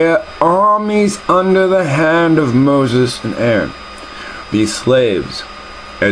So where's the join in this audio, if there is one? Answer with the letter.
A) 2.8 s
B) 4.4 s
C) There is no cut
A